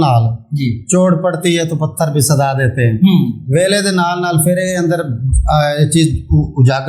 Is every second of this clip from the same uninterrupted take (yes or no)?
yes